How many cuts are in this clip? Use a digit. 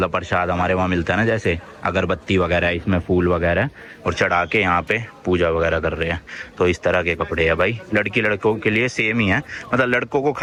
0